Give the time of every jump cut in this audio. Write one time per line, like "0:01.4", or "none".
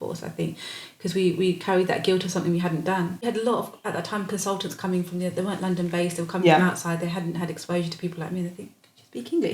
0:03.2